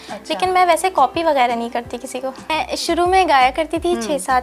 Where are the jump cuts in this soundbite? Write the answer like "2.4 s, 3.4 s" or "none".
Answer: 2.5 s